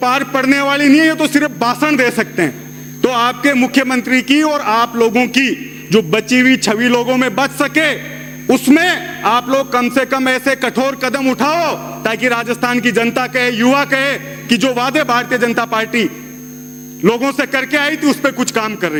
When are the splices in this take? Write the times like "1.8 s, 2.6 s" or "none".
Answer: none